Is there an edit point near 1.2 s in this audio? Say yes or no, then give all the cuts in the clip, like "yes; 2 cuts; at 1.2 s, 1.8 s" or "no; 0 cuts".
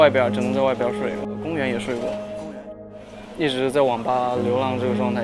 yes; 1 cut; at 1.2 s